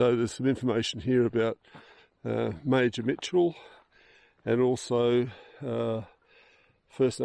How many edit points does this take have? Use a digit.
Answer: 0